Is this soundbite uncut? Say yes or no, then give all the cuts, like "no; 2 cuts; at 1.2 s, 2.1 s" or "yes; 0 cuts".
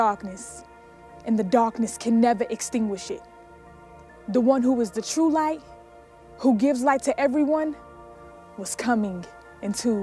yes; 0 cuts